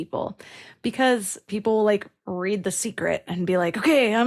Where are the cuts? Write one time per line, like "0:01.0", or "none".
0:01.5